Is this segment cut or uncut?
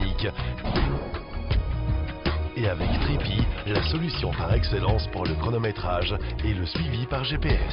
uncut